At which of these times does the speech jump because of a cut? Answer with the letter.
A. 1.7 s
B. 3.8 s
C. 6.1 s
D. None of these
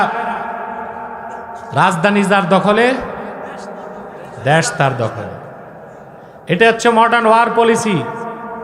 A